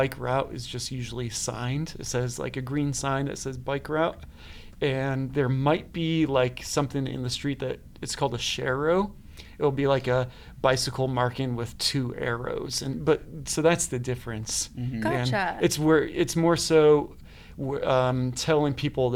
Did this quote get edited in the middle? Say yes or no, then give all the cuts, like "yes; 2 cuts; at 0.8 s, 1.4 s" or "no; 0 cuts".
no; 0 cuts